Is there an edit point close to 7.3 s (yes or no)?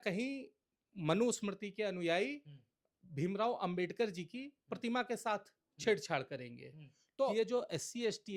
yes